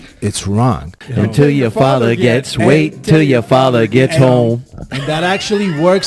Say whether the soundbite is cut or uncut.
cut